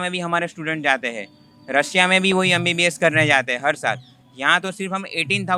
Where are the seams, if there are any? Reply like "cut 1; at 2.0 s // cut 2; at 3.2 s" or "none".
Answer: none